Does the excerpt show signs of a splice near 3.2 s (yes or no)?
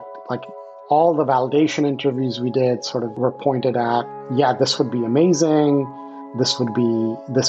yes